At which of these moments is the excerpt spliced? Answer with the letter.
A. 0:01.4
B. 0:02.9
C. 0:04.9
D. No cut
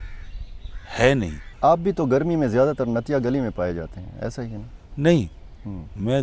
A